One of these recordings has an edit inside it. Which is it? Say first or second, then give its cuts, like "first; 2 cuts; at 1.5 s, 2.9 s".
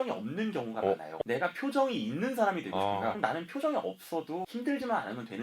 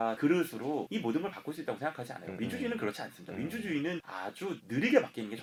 first; 3 cuts; at 1.2 s, 3.2 s, 4.5 s